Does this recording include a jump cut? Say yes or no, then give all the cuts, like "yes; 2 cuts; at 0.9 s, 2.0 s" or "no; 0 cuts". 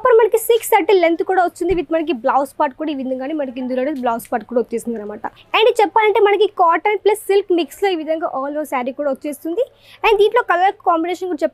yes; 1 cut; at 5.3 s